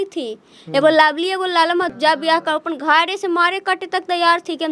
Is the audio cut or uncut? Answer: cut